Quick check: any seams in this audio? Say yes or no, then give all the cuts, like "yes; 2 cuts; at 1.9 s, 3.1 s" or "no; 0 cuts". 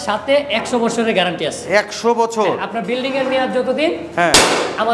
no; 0 cuts